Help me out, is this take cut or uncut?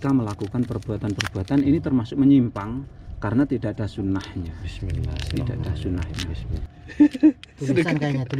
cut